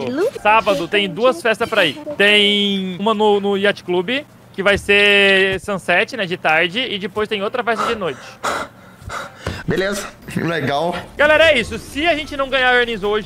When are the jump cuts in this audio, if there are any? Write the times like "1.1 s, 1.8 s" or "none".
9.6 s, 11.1 s